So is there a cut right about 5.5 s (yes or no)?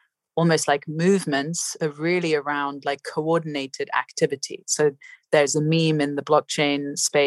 no